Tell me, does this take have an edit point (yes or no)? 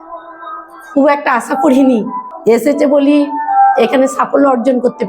yes